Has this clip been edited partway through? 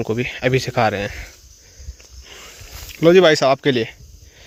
no; 0 cuts

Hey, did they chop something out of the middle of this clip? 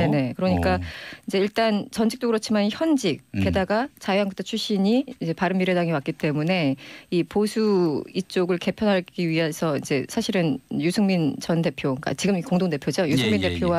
no; 0 cuts

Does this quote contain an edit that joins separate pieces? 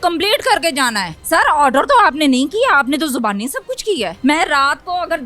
yes; 2 cuts; at 1.1 s, 4.1 s

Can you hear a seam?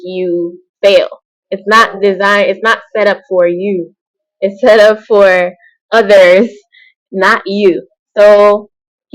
no; 0 cuts

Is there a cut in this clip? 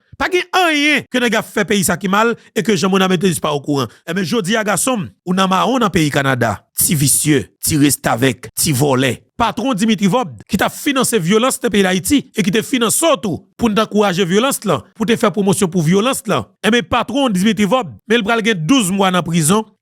yes; 2 cuts; at 1.0 s, 4.0 s

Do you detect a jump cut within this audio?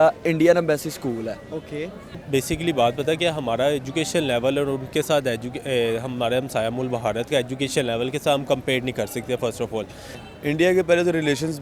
yes; 2 cuts; at 2.1 s, 10.2 s

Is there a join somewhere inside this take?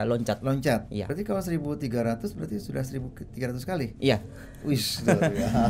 yes; 1 cut; at 1.1 s

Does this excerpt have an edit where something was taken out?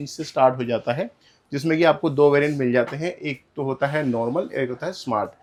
no; 0 cuts

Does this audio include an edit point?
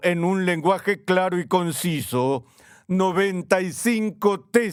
no; 0 cuts

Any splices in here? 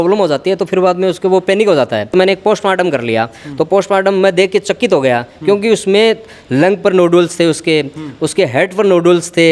yes; 1 cut; at 2.1 s

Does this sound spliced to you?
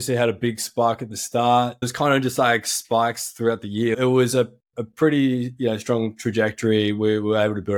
yes; 2 cuts; at 1.9 s, 4.0 s

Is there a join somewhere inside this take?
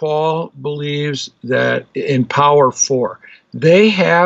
no; 0 cuts

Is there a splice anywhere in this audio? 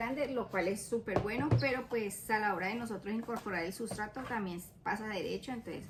no; 0 cuts

